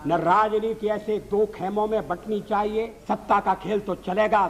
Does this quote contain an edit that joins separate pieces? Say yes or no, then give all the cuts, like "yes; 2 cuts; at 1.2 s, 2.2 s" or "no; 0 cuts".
yes; 1 cut; at 3.0 s